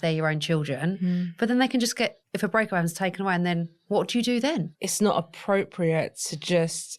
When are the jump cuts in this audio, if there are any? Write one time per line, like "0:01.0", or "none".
0:02.2
0:03.8
0:04.7